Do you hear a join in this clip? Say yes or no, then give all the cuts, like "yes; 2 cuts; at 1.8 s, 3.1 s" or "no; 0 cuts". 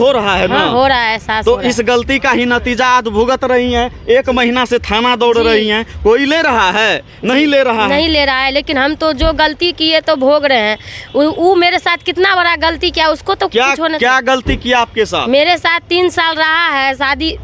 no; 0 cuts